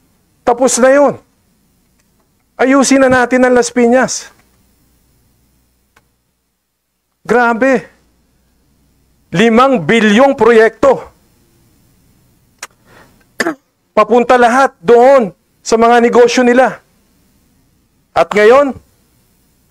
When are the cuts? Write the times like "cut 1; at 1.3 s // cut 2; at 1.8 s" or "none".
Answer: none